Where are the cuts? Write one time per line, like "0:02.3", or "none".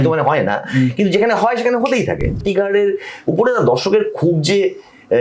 0:02.4